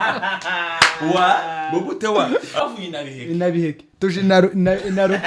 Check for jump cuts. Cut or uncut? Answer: cut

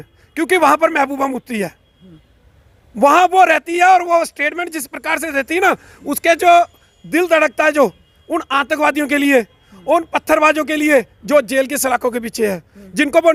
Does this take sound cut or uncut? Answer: uncut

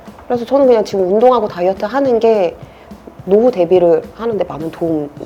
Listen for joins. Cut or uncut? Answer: uncut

